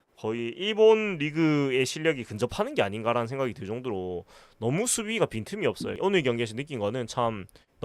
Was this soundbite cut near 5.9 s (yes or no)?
yes